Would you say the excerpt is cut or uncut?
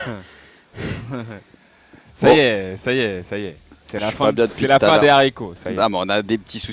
uncut